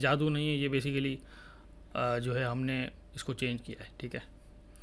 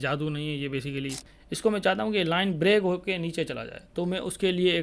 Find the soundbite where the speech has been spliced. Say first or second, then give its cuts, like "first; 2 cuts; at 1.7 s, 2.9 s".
second; 1 cut; at 1.3 s